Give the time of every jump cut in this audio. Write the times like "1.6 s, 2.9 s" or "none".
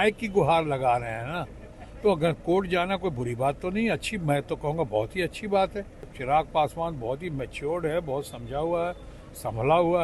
6.1 s